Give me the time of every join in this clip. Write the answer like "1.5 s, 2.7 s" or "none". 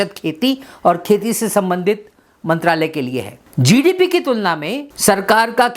3.4 s, 4.8 s